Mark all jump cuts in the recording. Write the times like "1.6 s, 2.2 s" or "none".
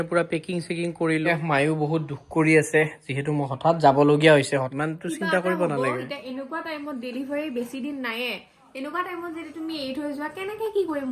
1.3 s, 4.7 s